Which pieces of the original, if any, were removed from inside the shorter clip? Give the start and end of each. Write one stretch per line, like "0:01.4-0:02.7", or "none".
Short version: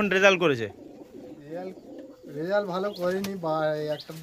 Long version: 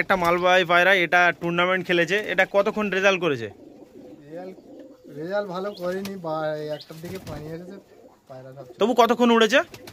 none